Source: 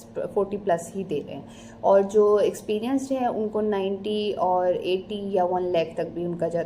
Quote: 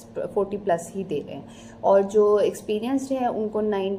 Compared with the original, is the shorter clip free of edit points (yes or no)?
yes